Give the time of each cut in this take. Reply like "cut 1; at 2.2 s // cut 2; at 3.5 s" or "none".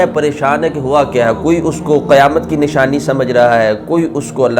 none

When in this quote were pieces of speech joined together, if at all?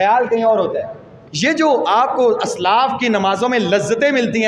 cut 1; at 1.1 s

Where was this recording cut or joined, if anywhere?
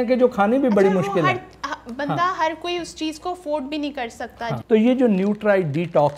cut 1; at 4.5 s

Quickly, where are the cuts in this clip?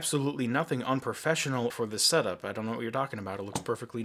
cut 1; at 1.7 s

